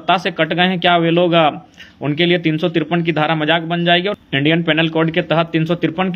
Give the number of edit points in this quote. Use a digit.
1